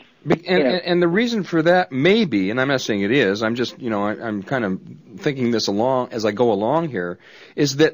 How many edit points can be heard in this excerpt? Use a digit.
1